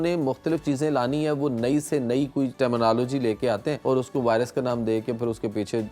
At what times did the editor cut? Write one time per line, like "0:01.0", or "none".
0:02.5
0:03.8